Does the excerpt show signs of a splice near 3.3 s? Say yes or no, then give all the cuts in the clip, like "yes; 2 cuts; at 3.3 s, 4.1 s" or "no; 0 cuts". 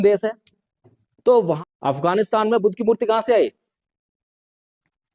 no; 1 cut; at 1.6 s